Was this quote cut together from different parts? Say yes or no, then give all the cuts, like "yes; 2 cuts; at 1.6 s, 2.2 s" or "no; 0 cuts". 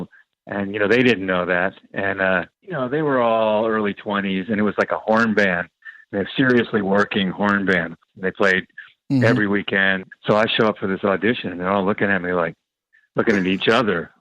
yes; 3 cuts; at 2.6 s, 8.0 s, 10.1 s